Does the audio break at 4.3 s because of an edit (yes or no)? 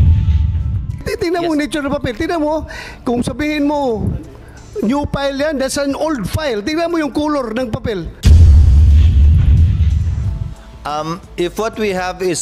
no